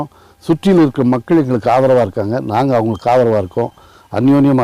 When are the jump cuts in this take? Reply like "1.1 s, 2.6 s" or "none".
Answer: none